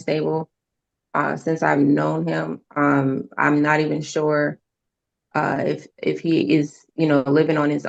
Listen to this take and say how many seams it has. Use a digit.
0